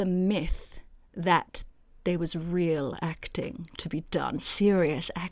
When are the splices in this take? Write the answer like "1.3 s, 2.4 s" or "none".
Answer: none